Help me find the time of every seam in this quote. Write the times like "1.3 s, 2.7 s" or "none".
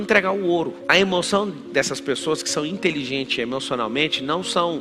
none